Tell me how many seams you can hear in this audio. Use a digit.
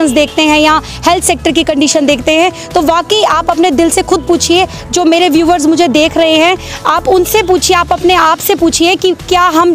0